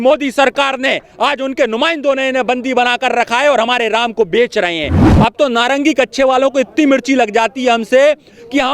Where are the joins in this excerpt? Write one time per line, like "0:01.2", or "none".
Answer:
0:05.0